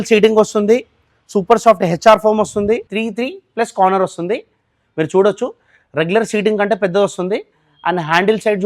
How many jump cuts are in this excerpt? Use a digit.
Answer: 1